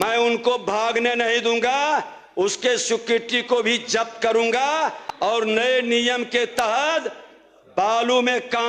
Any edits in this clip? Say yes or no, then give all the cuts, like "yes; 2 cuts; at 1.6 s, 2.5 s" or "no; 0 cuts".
no; 0 cuts